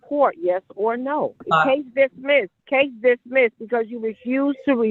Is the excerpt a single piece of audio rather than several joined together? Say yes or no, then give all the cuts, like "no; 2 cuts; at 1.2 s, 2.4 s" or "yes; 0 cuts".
no; 2 cuts; at 1.4 s, 2.6 s